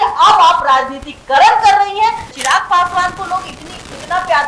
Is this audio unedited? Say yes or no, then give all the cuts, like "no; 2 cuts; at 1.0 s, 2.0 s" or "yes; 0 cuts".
no; 1 cut; at 2.3 s